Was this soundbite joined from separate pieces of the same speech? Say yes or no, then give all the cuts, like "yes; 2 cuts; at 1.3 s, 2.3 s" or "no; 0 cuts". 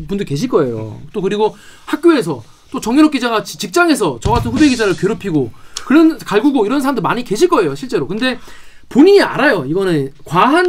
no; 0 cuts